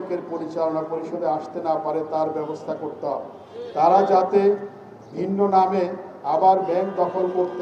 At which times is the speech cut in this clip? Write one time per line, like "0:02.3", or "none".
none